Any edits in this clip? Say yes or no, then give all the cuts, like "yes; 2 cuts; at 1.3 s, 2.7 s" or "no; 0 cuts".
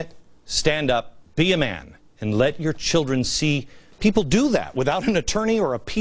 yes; 1 cut; at 3.4 s